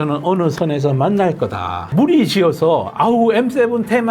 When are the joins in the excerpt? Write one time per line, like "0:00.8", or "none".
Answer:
0:01.9